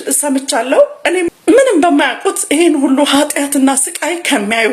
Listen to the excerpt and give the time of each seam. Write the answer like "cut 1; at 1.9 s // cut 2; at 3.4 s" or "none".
cut 1; at 1.3 s